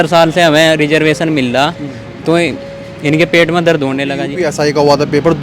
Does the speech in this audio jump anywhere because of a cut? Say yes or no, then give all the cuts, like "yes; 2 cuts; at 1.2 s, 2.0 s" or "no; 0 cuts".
yes; 1 cut; at 4.3 s